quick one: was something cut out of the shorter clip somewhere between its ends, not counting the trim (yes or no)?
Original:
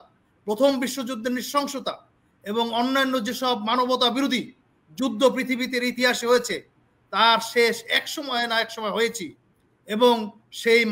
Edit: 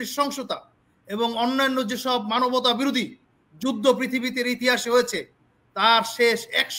no